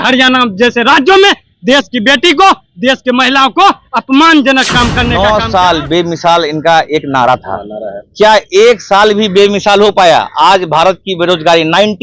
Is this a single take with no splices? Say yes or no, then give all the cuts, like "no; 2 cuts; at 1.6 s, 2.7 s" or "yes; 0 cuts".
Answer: no; 1 cut; at 5.1 s